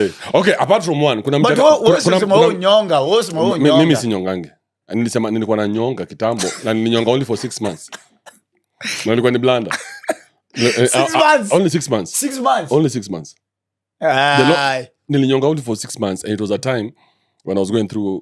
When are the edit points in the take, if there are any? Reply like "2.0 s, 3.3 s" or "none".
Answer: none

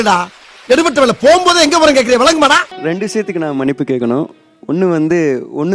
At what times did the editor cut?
2.7 s

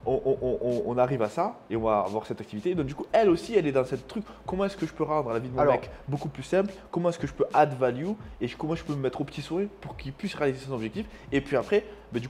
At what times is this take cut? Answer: none

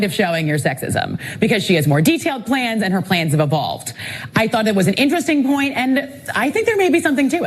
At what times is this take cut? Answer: 3.4 s

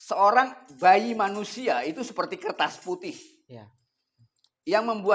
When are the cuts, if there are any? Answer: none

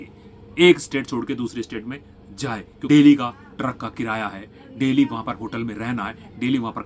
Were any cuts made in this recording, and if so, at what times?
2.7 s

